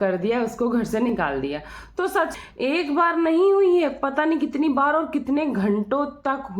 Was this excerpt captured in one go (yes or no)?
no